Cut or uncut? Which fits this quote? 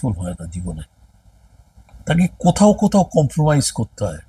uncut